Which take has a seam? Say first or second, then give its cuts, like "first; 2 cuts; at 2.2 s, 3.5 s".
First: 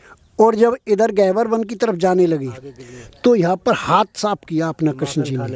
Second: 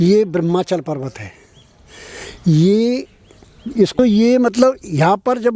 second; 1 cut; at 3.9 s